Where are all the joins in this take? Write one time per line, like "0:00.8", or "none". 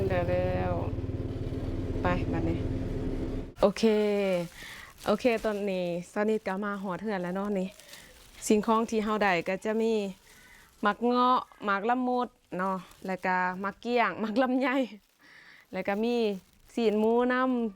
0:03.4